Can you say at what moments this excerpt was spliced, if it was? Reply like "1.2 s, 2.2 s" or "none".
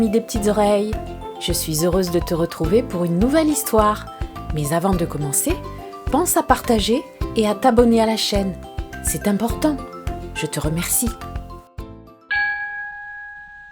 12.1 s